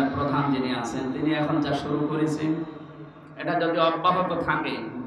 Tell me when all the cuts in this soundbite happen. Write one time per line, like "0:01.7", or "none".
none